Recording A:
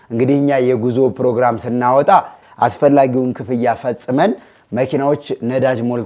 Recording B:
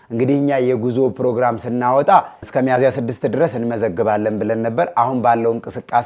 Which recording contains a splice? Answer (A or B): A